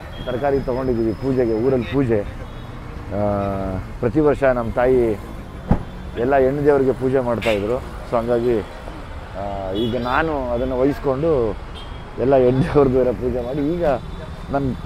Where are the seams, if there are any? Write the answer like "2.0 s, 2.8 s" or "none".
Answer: none

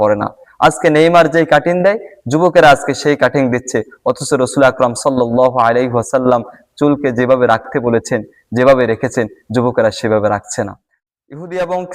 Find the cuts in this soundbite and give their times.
10.9 s

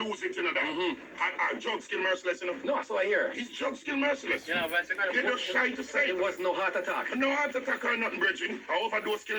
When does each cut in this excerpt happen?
1.8 s, 7.4 s

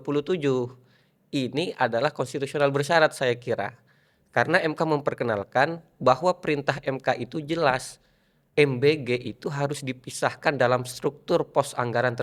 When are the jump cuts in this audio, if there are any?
none

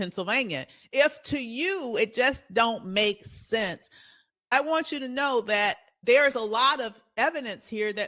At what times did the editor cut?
5.9 s, 7.0 s

